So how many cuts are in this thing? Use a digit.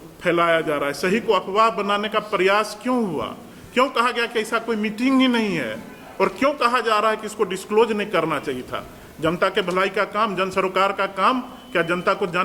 0